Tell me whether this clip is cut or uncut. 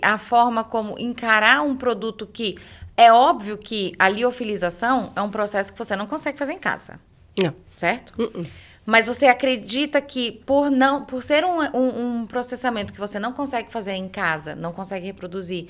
uncut